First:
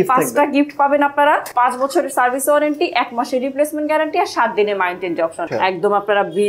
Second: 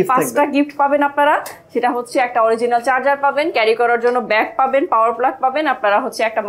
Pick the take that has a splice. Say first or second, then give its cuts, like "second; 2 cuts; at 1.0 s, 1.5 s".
first; 2 cuts; at 1.5 s, 5.4 s